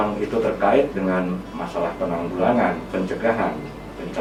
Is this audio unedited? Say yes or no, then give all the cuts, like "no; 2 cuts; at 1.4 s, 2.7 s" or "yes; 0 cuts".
yes; 0 cuts